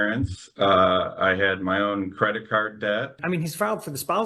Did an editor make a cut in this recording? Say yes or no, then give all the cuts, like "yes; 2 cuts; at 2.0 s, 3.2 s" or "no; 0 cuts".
yes; 1 cut; at 3.2 s